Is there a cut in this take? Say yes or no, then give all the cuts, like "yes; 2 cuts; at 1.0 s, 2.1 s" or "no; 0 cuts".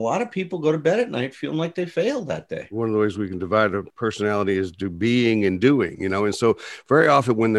yes; 2 cuts; at 2.6 s, 3.9 s